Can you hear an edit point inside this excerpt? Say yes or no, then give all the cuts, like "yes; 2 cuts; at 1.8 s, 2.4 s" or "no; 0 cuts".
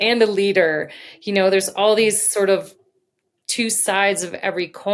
no; 0 cuts